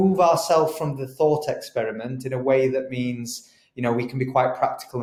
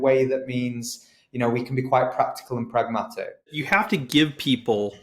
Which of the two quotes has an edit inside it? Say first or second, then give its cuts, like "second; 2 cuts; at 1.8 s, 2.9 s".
second; 1 cut; at 3.6 s